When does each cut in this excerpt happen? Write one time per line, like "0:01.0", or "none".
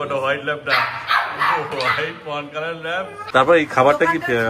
0:03.2